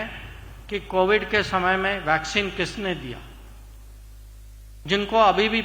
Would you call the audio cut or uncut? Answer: uncut